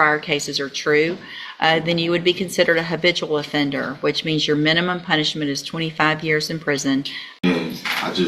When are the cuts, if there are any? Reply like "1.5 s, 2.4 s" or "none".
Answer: 7.2 s